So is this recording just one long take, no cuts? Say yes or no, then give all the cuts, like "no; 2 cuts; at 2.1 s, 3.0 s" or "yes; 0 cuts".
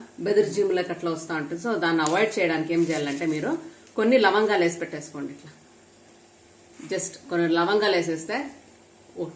yes; 0 cuts